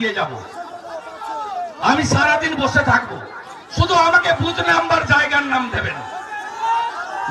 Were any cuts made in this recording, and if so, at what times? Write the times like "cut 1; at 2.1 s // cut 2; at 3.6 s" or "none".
none